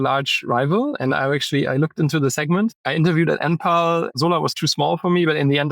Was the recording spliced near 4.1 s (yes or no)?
yes